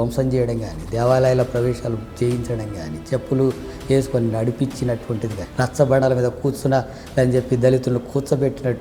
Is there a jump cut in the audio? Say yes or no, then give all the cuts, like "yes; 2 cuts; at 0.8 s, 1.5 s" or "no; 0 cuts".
yes; 1 cut; at 5.4 s